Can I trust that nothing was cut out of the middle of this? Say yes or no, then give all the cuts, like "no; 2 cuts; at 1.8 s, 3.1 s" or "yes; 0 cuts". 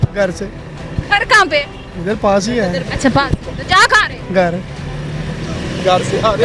yes; 0 cuts